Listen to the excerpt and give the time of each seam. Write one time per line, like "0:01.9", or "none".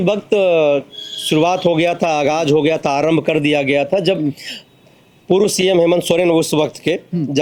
none